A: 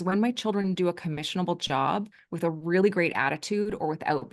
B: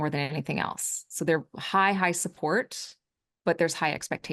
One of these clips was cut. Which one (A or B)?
A